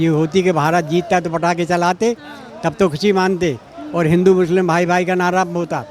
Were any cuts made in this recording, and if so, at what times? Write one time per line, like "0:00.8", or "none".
none